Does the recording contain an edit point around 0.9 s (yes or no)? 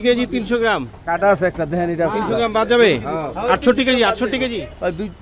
yes